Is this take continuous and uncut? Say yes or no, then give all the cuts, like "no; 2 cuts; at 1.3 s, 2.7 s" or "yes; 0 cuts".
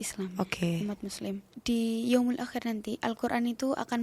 no; 2 cuts; at 1.5 s, 3.0 s